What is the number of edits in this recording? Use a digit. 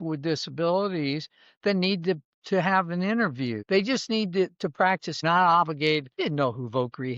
3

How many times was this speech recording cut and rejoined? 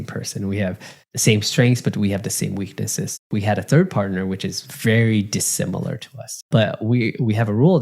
2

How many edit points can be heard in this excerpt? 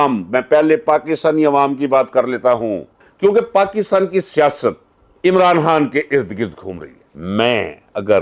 2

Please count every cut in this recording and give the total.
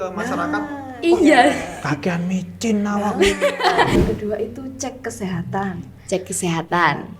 1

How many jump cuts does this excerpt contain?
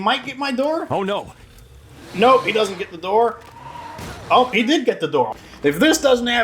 1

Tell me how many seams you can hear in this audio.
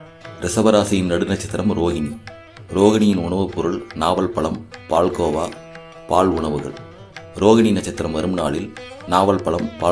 0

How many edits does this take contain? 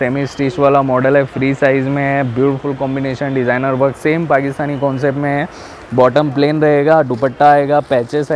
0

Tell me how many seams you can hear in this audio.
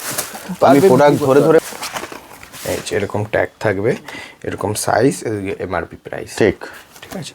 1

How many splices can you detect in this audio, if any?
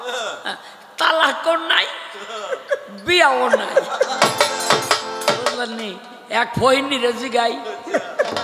1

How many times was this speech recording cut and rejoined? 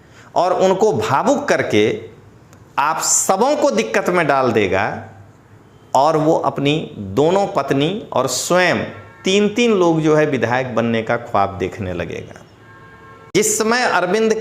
1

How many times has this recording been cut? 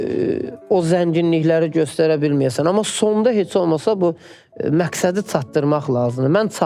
0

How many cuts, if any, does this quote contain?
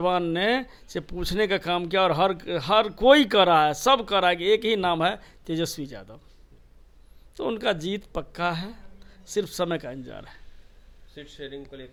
0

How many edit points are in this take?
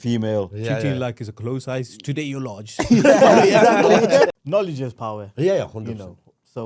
1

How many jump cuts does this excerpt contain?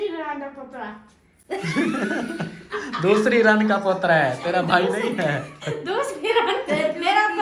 0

